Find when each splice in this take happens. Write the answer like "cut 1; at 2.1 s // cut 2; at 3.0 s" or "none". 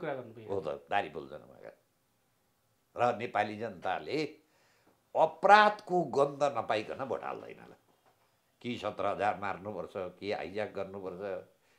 none